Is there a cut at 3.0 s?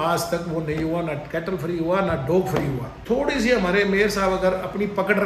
yes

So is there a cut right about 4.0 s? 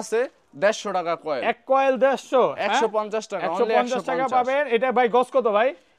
no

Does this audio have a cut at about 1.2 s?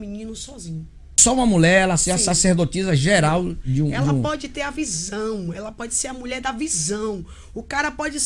yes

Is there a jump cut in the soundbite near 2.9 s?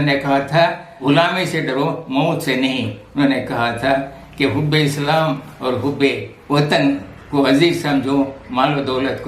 no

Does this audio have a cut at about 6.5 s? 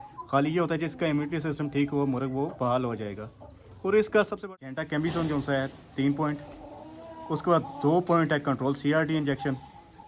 no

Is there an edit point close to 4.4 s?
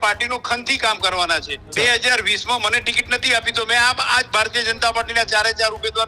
no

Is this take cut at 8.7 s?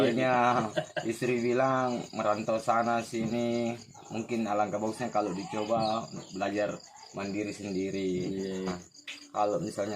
yes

